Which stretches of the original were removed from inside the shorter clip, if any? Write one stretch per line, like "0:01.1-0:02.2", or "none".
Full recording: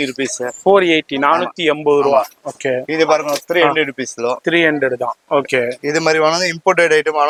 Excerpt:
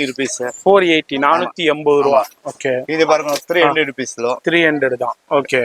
none